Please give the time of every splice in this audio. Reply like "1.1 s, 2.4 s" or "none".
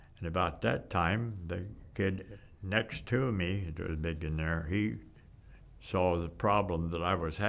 1.8 s